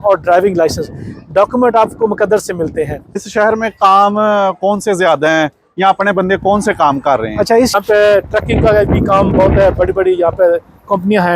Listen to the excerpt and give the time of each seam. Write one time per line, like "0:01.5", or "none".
0:03.2
0:07.7